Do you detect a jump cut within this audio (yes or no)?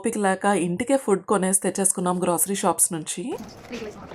no